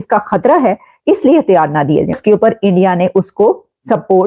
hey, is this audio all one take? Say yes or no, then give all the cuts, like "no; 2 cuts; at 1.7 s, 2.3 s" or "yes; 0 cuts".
no; 1 cut; at 2.2 s